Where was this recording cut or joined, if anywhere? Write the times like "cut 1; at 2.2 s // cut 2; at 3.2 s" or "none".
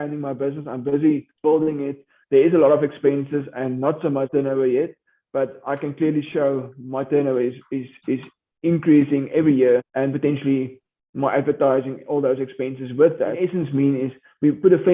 cut 1; at 13.3 s